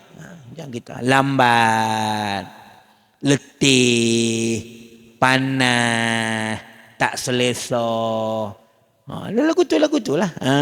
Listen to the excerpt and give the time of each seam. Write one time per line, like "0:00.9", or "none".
none